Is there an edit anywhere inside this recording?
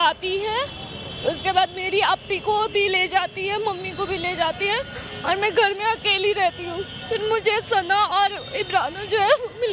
no; 0 cuts

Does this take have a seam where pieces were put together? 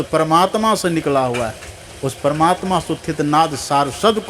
no; 0 cuts

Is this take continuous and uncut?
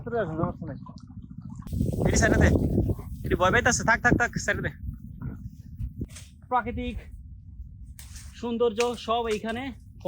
no; 2 cuts; at 1.6 s, 6.0 s

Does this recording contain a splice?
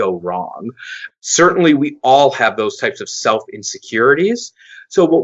yes; 1 cut; at 1.0 s

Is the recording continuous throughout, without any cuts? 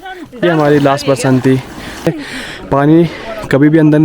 no; 1 cut; at 2.1 s

